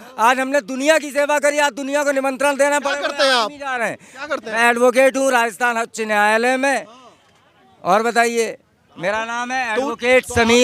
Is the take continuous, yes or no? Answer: yes